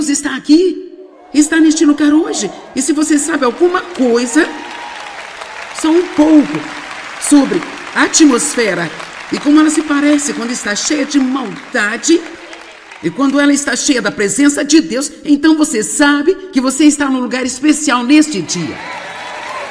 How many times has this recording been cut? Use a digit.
1